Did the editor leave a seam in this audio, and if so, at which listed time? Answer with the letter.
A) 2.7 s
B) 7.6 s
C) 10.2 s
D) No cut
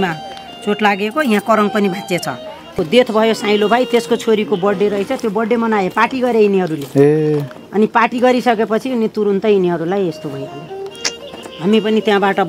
A